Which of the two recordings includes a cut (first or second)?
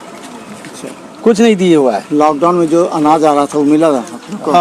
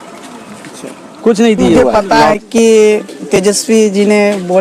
second